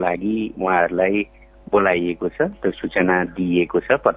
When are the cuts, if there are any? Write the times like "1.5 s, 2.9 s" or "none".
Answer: none